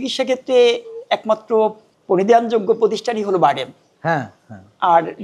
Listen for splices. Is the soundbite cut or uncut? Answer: cut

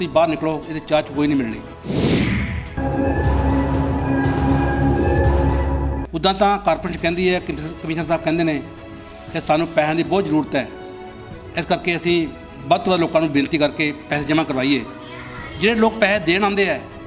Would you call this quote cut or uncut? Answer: cut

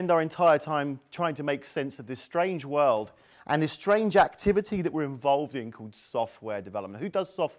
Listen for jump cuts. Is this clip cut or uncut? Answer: cut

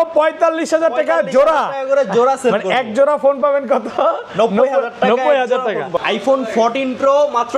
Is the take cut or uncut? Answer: cut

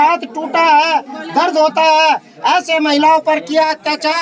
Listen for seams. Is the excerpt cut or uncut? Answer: uncut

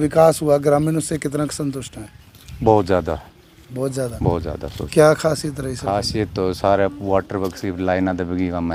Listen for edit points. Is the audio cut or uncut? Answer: uncut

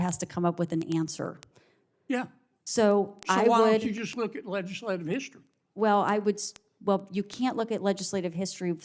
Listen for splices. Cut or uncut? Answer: uncut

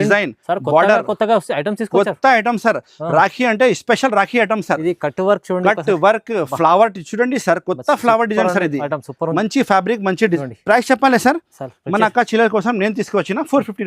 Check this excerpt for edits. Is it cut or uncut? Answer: cut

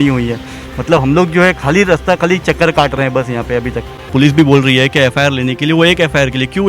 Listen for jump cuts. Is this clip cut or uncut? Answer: cut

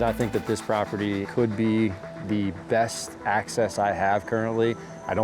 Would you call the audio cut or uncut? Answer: cut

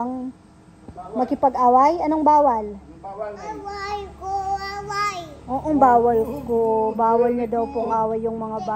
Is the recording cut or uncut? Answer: uncut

